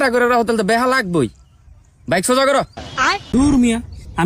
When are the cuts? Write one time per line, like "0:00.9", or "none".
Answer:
0:03.4